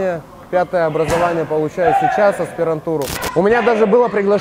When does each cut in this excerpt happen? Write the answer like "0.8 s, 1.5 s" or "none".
3.2 s